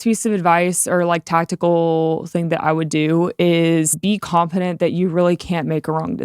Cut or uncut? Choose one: cut